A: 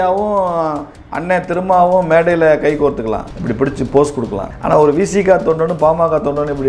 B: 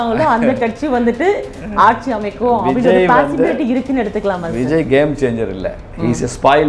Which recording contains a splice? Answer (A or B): A